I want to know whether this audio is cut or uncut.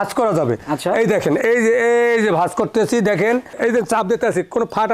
cut